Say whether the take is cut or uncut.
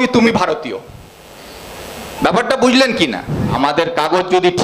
cut